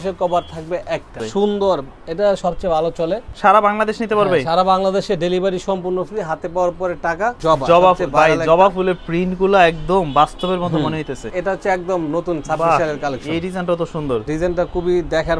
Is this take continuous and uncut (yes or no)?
no